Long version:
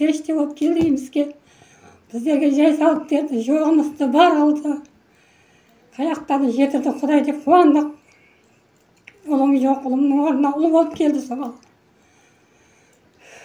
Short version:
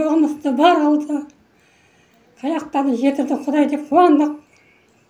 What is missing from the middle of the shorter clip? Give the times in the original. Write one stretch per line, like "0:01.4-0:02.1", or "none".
none